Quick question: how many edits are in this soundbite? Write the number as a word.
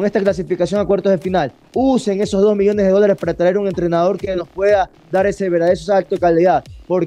zero